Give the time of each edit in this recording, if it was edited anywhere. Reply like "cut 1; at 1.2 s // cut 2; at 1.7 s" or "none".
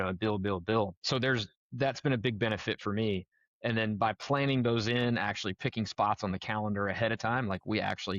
cut 1; at 1.0 s